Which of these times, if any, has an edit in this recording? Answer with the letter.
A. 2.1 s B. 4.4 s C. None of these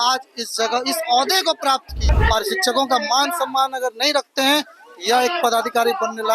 A